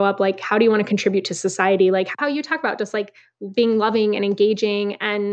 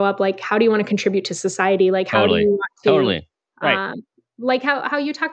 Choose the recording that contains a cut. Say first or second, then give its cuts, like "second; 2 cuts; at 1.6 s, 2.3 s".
first; 1 cut; at 2.1 s